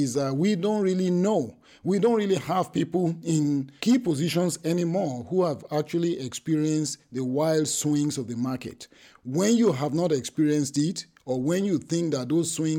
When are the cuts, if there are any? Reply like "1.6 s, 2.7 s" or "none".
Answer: 3.2 s